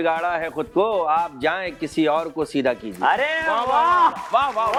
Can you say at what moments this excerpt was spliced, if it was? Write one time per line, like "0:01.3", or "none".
none